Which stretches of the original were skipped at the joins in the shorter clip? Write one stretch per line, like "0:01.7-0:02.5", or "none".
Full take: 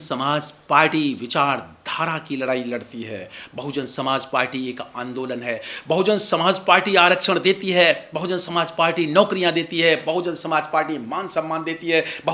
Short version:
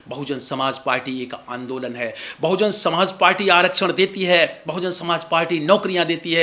none